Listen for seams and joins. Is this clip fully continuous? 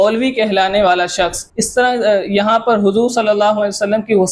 no; 1 cut; at 1.5 s

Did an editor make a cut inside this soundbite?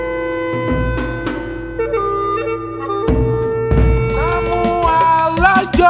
yes; 1 cut; at 4.5 s

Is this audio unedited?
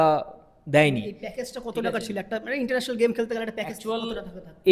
yes; 0 cuts

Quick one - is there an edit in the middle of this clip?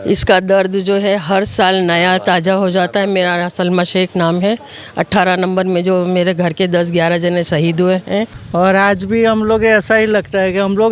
yes; 1 cut; at 8.4 s

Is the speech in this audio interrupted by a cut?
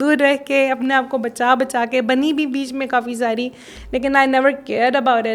no; 0 cuts

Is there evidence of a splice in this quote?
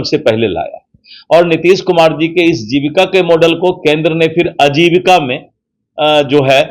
no; 0 cuts

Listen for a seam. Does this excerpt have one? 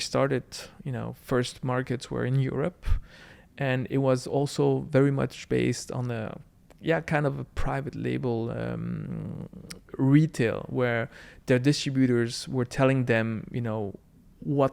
no; 0 cuts

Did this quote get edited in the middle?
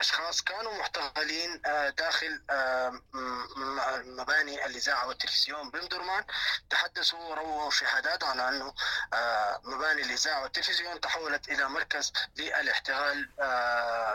no; 0 cuts

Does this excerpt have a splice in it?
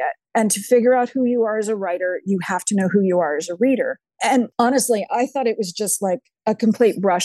yes; 1 cut; at 4.1 s

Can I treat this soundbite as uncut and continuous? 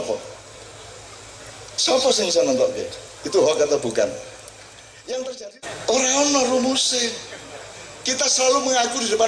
no; 1 cut; at 5.5 s

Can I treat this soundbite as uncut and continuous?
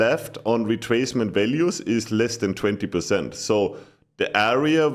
yes; 0 cuts

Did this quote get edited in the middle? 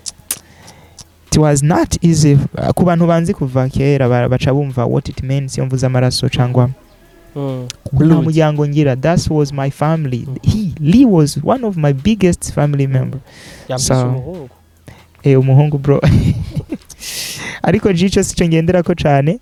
no; 0 cuts

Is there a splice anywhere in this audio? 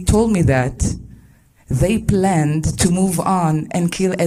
no; 0 cuts

